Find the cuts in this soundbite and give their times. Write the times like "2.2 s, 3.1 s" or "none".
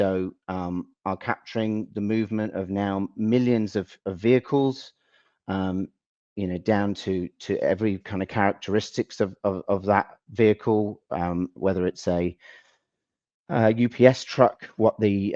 none